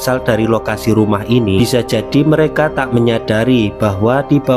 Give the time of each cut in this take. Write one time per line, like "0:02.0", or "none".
0:01.6

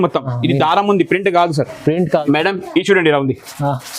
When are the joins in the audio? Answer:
0:02.2

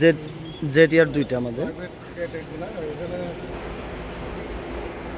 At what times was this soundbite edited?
0:03.5

